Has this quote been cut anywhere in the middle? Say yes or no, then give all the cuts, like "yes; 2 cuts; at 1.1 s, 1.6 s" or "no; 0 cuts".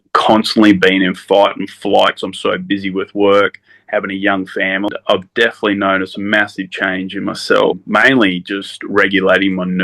yes; 1 cut; at 4.9 s